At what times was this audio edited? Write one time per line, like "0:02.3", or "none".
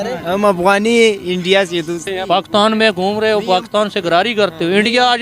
0:02.1